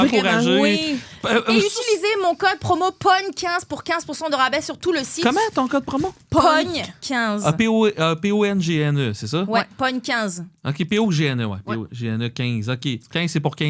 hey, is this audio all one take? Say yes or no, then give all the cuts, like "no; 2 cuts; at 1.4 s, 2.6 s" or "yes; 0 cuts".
yes; 0 cuts